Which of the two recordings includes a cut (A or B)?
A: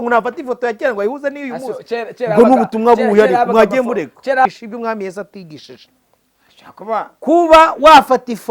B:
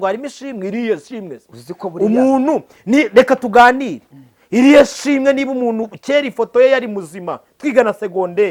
A